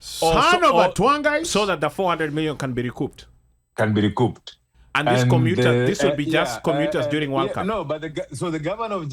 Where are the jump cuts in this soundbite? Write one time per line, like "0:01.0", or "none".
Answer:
none